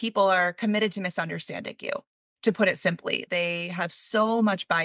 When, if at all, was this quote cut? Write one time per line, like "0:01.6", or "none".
0:03.2